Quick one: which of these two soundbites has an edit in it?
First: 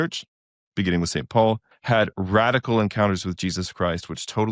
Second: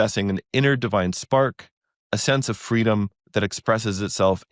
first; 1 cut; at 1.7 s

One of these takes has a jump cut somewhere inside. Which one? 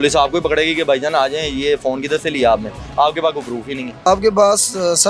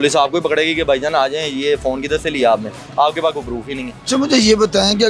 first; 1 cut; at 4.1 s

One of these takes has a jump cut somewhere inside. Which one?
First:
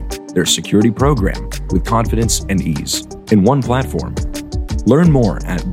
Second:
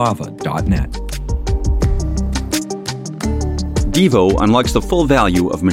second; 2 cuts; at 1.4 s, 3.9 s

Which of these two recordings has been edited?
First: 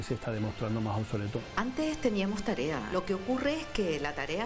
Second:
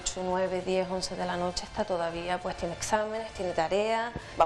first; 2 cuts; at 1.4 s, 2.9 s

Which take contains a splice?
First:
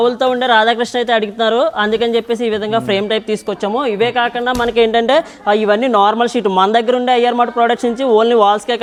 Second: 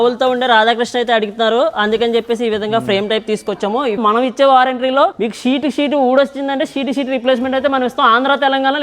second; 2 cuts; at 4.0 s, 5.2 s

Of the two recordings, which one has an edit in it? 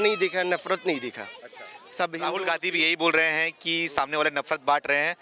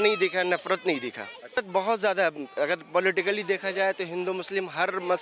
second; 1 cut; at 1.6 s

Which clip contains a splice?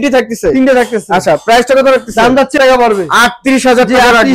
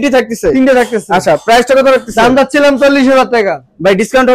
first; 1 cut; at 2.6 s

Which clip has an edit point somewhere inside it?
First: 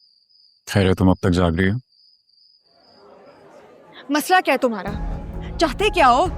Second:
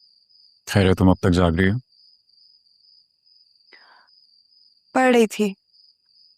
first; 1 cut; at 3.3 s

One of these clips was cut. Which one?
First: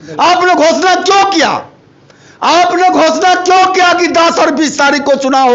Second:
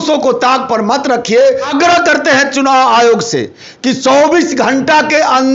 second; 1 cut; at 1.6 s

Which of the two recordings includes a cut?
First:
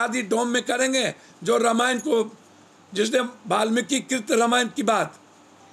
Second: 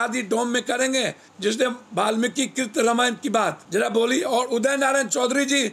second; 2 cuts; at 1.2 s, 3.6 s

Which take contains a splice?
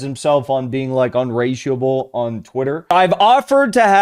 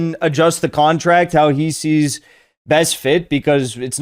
first; 1 cut; at 2.9 s

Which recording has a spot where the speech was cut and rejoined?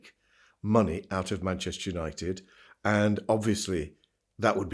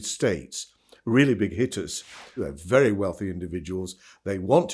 second; 1 cut; at 2.4 s

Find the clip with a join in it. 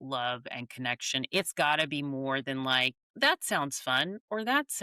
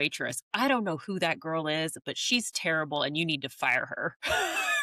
first; 2 cuts; at 1.3 s, 3.0 s

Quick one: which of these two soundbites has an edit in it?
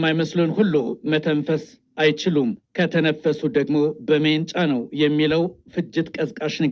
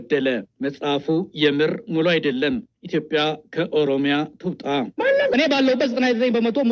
second; 1 cut; at 5.3 s

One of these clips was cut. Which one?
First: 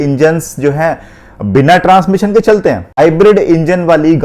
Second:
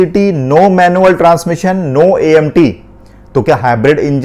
first; 1 cut; at 3.0 s

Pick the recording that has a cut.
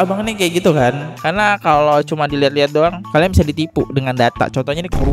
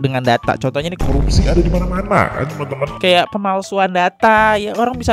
first; 1 cut; at 1.1 s

